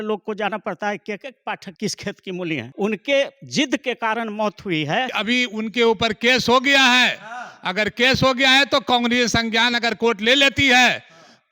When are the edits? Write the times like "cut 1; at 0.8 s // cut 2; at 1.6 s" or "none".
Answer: cut 1; at 1.7 s // cut 2; at 2.7 s // cut 3; at 5.1 s